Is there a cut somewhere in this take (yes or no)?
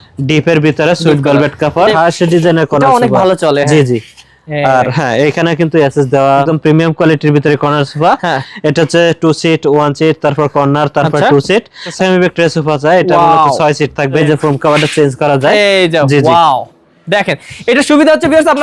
yes